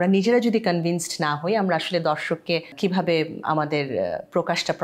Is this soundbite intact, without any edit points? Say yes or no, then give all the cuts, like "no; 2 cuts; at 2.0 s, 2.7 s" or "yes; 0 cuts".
no; 1 cut; at 2.7 s